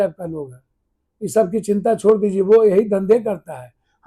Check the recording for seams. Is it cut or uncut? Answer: uncut